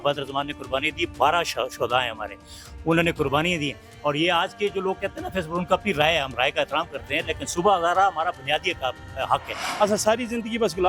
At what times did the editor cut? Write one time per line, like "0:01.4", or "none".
0:09.6